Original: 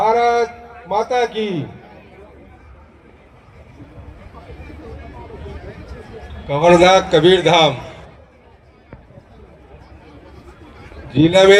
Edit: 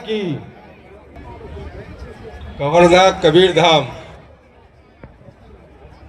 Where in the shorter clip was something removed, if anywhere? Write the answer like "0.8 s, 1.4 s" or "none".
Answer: 1.2 s